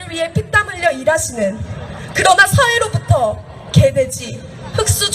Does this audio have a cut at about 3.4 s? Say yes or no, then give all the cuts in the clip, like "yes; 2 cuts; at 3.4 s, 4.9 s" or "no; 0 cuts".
yes; 1 cut; at 3.4 s